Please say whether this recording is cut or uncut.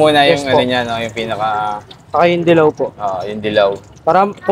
uncut